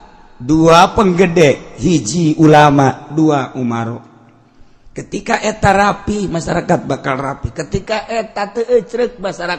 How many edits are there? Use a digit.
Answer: 0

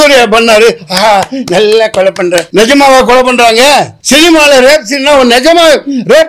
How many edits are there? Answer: 2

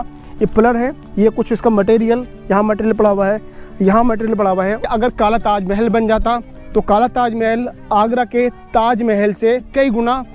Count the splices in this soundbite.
1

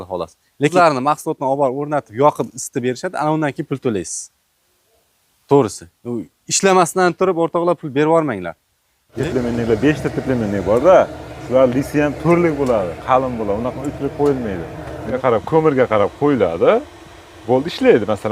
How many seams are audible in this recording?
3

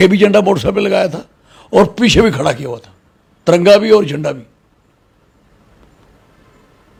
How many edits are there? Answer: 0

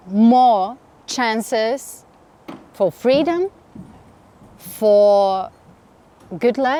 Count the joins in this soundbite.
0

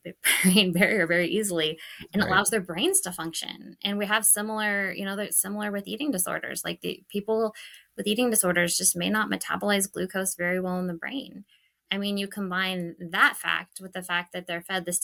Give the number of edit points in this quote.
0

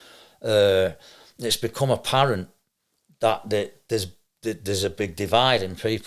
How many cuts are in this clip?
0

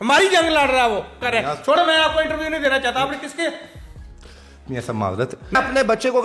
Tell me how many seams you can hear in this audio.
2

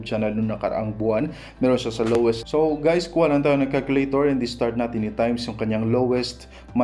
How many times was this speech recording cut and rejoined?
1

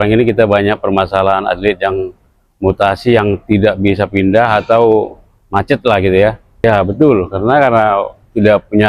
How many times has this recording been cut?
1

